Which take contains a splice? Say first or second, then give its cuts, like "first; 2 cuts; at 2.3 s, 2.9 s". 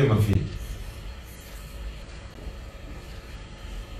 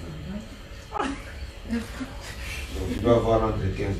first; 1 cut; at 2.0 s